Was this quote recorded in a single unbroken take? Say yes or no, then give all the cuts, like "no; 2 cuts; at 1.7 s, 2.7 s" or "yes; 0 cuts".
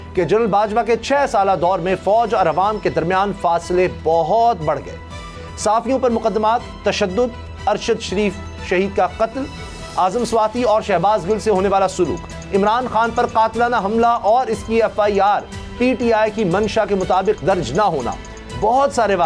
yes; 0 cuts